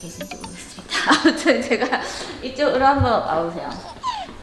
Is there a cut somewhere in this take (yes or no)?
no